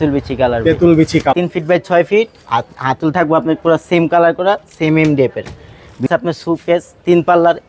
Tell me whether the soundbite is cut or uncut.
cut